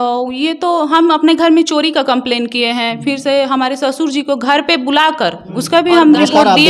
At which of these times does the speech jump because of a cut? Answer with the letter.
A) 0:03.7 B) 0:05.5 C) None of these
B